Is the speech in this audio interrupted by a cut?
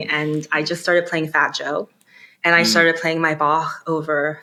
no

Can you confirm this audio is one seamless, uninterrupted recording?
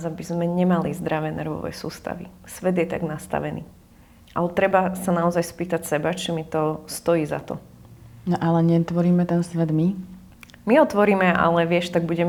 yes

